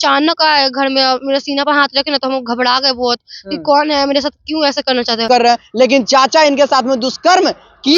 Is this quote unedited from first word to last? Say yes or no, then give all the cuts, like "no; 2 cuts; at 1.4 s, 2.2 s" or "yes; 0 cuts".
no; 1 cut; at 5.3 s